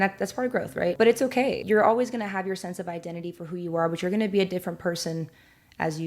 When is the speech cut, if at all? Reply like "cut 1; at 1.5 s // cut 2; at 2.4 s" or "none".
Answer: cut 1; at 0.9 s // cut 2; at 1.6 s